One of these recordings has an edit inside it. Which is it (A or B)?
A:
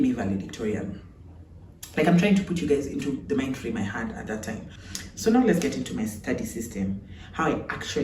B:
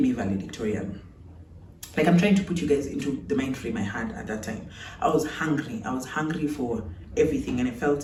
A